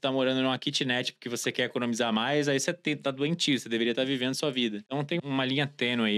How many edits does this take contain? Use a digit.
1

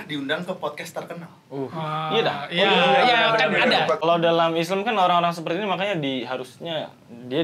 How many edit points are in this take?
1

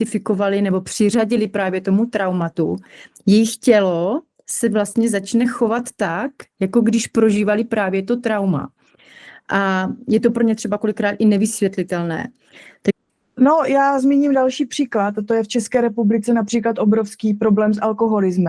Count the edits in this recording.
1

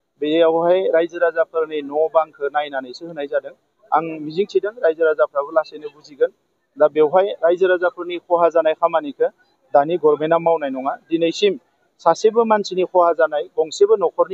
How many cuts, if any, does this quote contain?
1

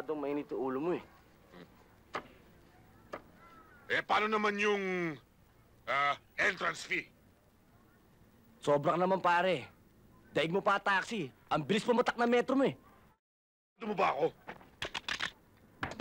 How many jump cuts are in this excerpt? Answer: 0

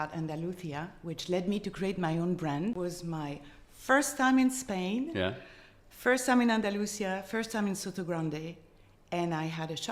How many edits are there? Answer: 1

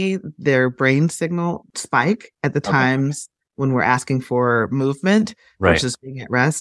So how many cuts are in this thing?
1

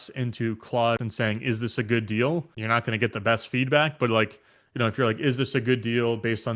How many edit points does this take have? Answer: 2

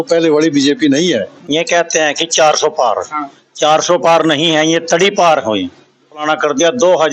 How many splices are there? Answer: 2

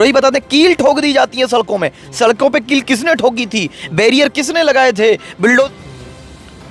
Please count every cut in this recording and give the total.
1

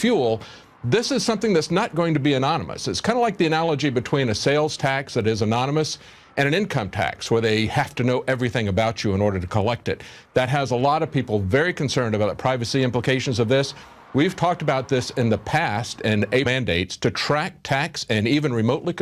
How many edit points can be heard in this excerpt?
0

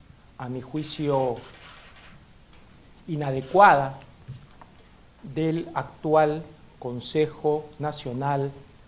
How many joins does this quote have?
1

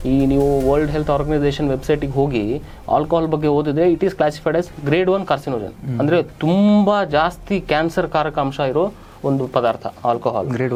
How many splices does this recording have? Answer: 0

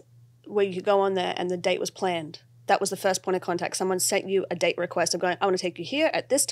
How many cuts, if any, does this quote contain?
0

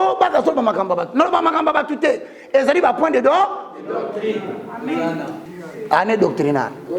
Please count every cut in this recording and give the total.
1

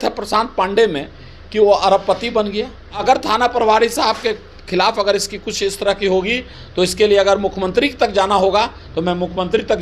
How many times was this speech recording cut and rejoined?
1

